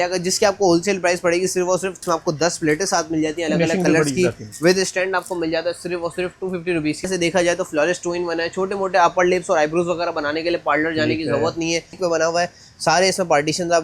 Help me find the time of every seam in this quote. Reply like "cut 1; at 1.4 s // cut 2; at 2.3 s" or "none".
cut 1; at 2.0 s // cut 2; at 7.1 s // cut 3; at 12.0 s